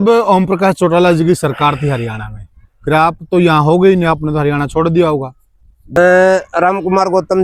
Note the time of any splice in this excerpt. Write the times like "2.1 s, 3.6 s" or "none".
6.0 s